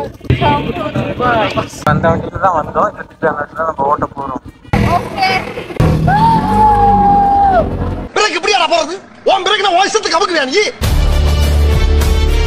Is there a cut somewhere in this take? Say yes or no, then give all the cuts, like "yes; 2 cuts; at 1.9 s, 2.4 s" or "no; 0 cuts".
no; 0 cuts